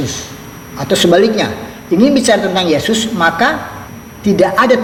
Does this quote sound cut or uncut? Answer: uncut